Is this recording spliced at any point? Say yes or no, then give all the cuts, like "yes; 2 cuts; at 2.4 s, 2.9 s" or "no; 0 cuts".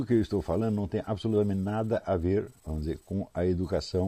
no; 0 cuts